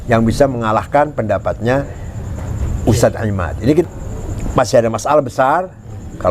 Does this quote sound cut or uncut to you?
cut